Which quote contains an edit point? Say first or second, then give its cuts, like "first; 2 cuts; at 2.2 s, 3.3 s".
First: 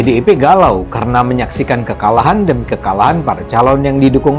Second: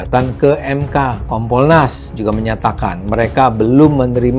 second; 1 cut; at 1.2 s